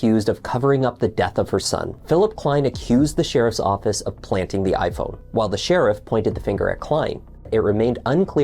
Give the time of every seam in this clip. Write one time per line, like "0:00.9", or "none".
0:01.9
0:05.2
0:07.5